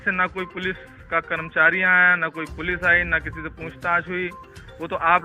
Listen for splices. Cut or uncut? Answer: uncut